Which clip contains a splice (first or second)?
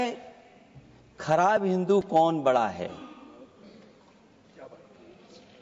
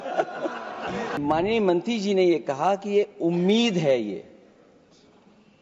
second